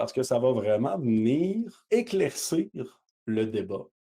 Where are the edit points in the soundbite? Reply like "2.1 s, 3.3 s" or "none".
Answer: 1.8 s